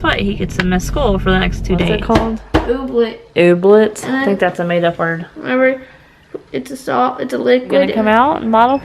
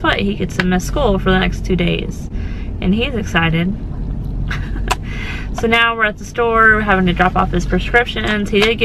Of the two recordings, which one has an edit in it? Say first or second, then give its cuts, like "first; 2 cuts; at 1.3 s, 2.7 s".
first; 2 cuts; at 2.0 s, 7.9 s